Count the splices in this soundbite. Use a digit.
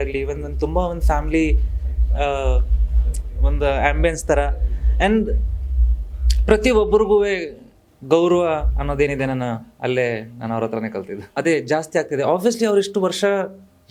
0